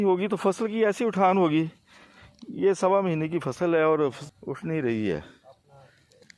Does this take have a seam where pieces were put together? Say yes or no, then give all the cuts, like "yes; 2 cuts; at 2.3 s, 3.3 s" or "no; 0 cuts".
no; 0 cuts